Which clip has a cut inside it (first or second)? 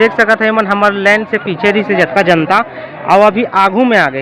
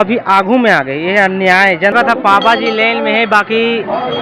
second